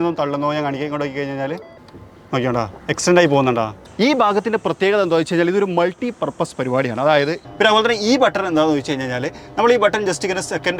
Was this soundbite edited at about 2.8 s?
yes; 3 cuts; at 2.8 s, 3.8 s, 7.4 s

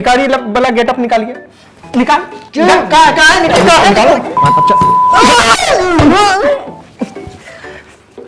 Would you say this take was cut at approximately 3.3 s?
no; 0 cuts

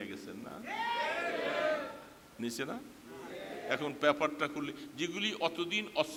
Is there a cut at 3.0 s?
no; 0 cuts

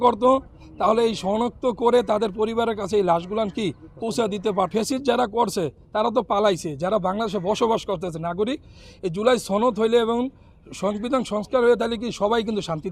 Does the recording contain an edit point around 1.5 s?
no; 1 cut; at 4.7 s

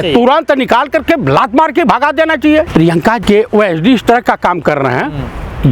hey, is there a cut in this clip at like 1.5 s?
no; 1 cut; at 2.9 s

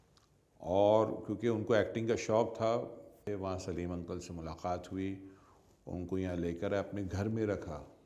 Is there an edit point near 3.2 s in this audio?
yes; 1 cut; at 3.2 s

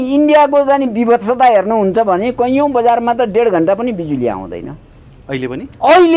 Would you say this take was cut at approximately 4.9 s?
no; 0 cuts

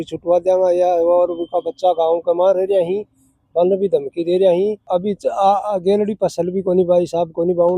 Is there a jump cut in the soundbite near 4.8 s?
yes; 1 cut; at 4.8 s

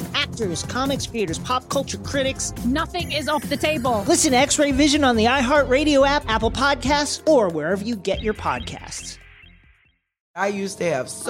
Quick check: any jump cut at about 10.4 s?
yes; 1 cut; at 10.4 s

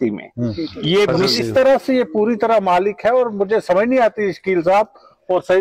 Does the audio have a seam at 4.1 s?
no; 1 cut; at 1.2 s

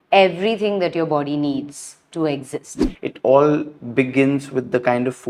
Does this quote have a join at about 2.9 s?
yes; 1 cut; at 2.9 s

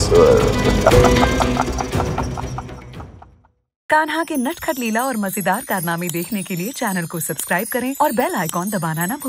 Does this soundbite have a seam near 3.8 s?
yes; 1 cut; at 3.8 s

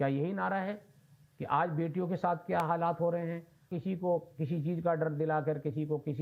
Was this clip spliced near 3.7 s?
yes; 1 cut; at 3.7 s

